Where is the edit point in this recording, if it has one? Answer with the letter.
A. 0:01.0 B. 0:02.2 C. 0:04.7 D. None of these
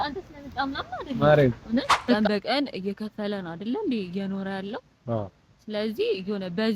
B